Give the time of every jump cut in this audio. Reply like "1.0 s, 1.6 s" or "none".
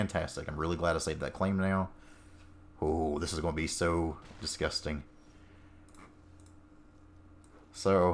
none